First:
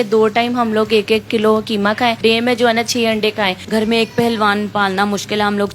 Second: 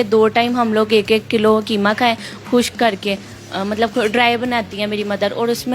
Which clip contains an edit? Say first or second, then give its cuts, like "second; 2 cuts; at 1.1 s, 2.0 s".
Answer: first; 2 cuts; at 2.2 s, 3.6 s